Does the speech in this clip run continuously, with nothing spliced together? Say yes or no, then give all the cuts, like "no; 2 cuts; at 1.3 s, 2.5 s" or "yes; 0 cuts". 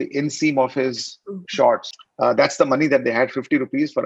no; 1 cut; at 2.0 s